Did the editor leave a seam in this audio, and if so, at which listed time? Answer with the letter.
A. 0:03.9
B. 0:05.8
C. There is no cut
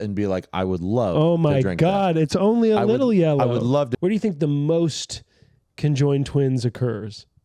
A